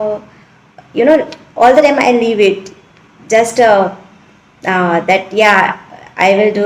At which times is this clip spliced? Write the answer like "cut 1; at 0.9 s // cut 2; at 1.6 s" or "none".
none